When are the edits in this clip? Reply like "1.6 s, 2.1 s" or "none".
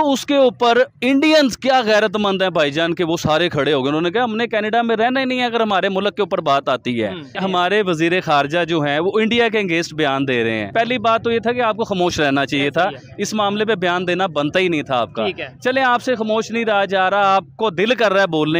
7.4 s, 10.7 s

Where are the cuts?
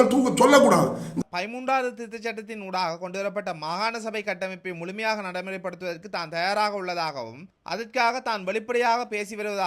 1.1 s

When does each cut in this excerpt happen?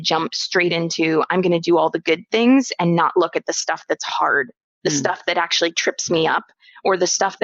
none

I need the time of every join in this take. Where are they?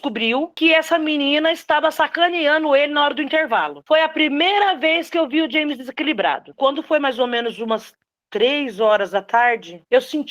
3.8 s, 6.4 s

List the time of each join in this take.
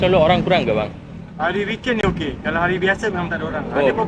none

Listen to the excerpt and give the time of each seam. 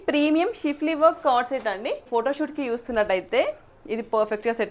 2.0 s

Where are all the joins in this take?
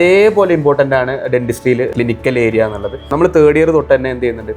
1.9 s, 3.1 s

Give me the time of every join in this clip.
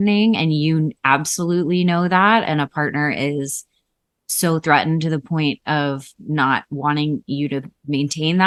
none

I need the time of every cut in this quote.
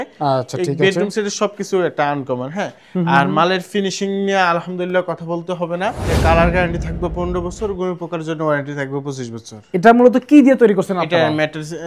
6.1 s

